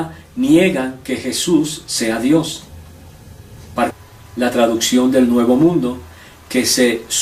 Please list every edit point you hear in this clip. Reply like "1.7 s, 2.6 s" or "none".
none